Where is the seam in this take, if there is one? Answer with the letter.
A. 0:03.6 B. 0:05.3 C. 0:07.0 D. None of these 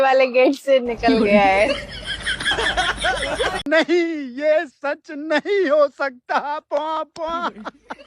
A